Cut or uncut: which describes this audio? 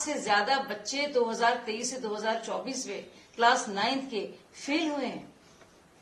uncut